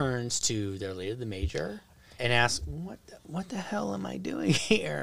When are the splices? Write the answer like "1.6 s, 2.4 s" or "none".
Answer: 2.2 s